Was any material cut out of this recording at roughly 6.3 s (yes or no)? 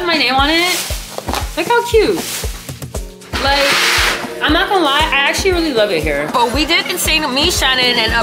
yes